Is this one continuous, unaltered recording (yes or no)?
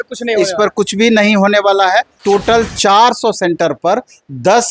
no